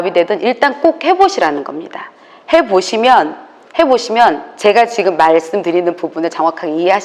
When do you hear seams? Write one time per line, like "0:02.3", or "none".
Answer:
none